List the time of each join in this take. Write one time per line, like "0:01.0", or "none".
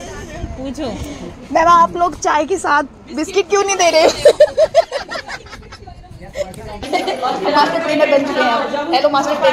0:06.9